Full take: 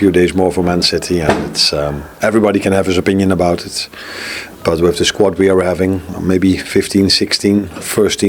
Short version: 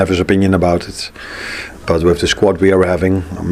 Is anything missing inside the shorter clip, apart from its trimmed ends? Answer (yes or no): no